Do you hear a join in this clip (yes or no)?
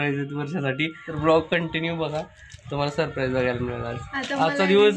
yes